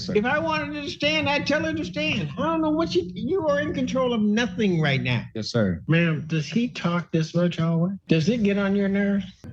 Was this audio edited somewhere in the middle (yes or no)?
yes